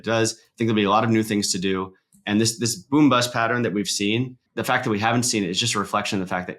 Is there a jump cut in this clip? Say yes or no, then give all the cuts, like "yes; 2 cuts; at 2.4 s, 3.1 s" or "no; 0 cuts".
yes; 1 cut; at 4.5 s